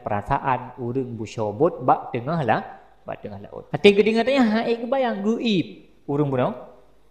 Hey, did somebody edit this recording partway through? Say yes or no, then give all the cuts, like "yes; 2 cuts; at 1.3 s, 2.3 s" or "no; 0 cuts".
yes; 1 cut; at 3.5 s